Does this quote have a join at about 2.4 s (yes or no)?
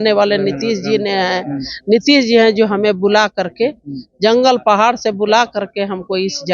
no